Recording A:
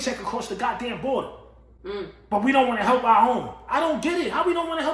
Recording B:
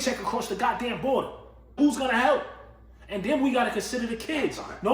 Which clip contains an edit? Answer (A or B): B